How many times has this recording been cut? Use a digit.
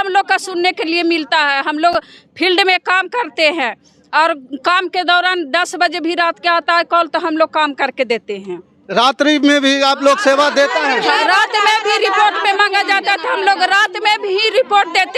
0